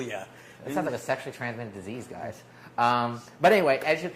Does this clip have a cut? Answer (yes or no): yes